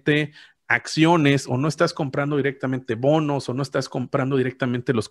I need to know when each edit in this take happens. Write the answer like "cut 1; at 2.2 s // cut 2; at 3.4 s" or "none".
none